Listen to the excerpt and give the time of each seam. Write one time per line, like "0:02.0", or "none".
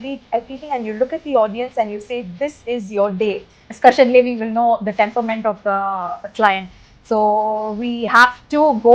0:03.7